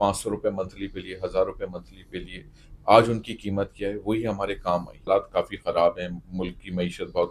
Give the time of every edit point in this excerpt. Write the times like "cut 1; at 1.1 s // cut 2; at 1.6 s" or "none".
cut 1; at 5.0 s